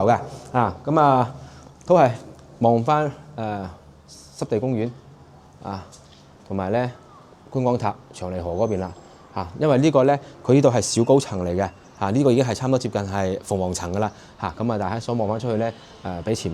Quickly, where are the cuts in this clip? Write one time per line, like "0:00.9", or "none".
none